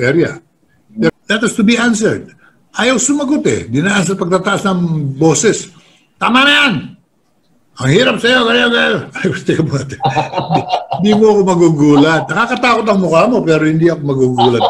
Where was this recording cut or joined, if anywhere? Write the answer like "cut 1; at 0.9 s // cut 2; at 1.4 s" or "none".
cut 1; at 1.1 s